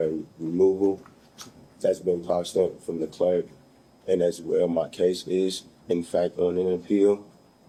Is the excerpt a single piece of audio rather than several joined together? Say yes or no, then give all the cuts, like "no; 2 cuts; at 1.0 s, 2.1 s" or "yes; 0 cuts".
yes; 0 cuts